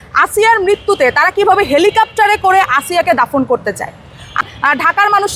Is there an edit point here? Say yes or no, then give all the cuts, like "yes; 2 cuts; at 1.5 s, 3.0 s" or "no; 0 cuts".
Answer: yes; 1 cut; at 4.4 s